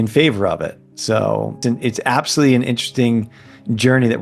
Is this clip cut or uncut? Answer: cut